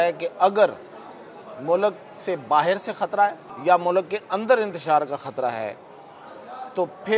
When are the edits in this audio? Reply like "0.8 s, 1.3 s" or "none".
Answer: 3.5 s